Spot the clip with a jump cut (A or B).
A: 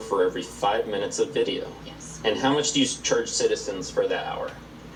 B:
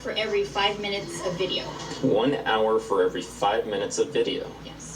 B